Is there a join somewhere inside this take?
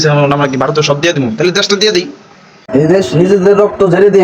yes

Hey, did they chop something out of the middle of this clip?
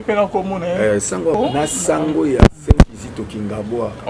yes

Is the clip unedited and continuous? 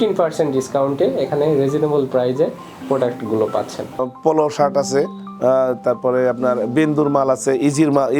no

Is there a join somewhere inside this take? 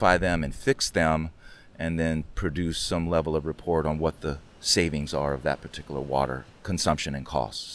yes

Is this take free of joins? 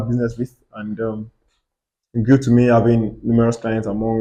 yes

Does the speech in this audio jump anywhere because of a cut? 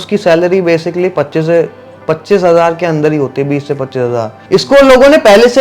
yes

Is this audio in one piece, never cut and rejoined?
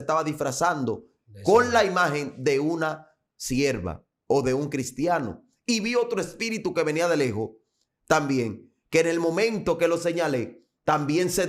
yes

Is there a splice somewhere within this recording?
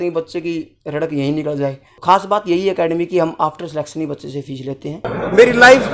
yes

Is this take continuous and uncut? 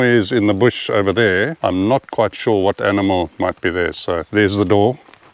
no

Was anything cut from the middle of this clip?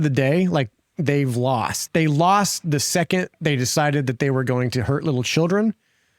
yes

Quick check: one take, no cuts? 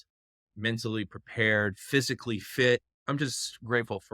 no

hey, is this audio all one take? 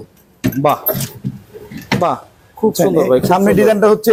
yes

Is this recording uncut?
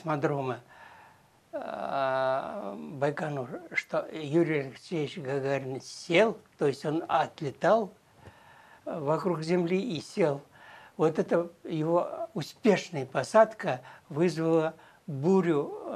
yes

